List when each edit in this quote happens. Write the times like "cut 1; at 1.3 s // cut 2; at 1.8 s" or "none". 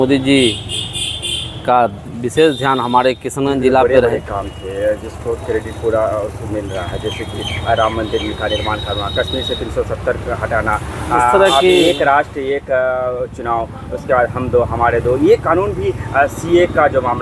cut 1; at 4.1 s